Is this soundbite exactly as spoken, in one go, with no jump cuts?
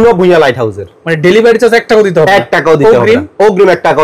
yes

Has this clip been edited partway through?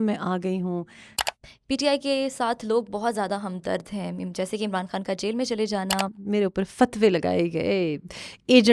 yes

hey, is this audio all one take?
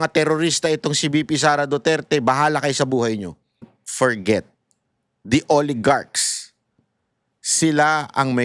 no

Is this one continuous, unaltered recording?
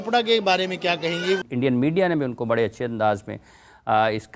no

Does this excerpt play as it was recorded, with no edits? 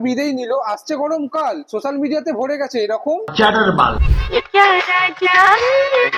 no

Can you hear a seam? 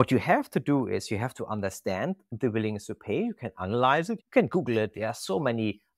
yes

